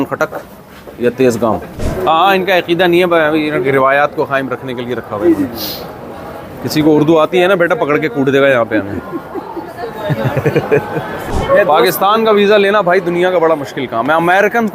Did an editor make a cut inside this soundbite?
yes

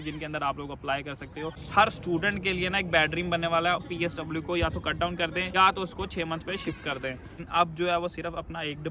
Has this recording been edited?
yes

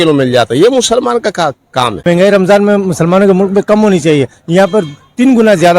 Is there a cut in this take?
yes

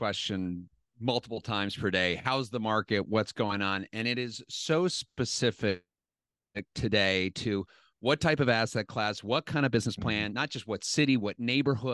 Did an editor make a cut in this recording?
no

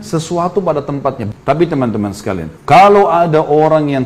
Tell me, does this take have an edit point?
yes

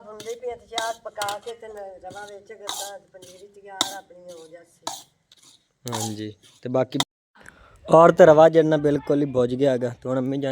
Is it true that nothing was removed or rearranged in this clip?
no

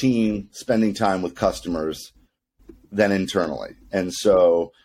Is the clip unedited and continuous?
yes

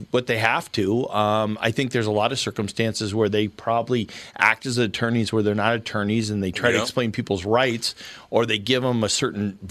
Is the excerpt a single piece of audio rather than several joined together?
yes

